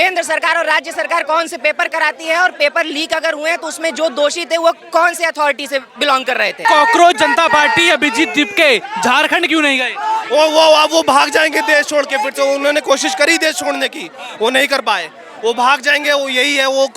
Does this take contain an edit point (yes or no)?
yes